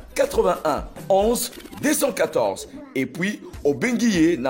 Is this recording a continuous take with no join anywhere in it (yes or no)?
yes